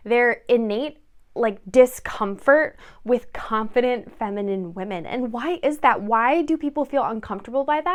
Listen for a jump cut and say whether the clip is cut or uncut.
uncut